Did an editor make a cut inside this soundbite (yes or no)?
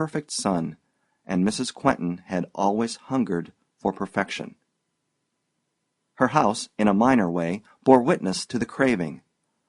yes